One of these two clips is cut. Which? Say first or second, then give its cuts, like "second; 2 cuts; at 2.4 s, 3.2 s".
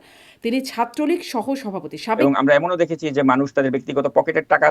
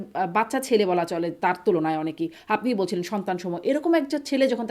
first; 1 cut; at 2.2 s